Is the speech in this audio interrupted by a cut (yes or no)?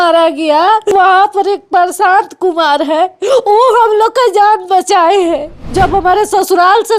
yes